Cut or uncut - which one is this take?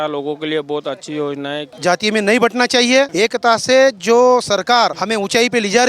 cut